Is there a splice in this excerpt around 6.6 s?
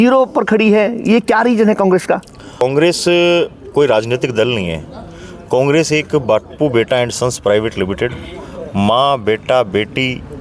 no; 1 cut; at 2.6 s

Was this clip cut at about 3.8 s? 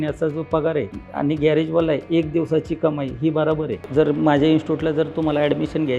yes; 2 cuts; at 1.0 s, 3.8 s

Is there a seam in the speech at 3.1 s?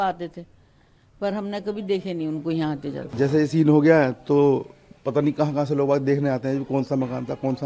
yes; 1 cut; at 3.1 s

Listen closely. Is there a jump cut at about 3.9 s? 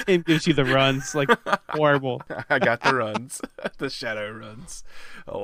no; 1 cut; at 2.3 s

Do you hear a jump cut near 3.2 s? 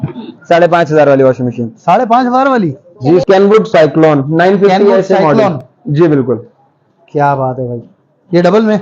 yes; 1 cut; at 3.2 s

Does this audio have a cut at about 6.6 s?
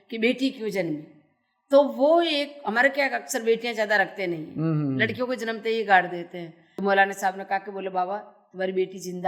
yes; 1 cut; at 6.6 s

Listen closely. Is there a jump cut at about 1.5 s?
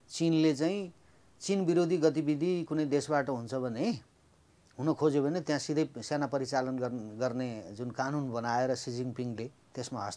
no; 0 cuts

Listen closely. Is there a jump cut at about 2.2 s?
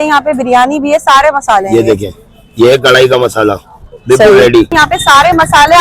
no; 1 cut; at 4.7 s

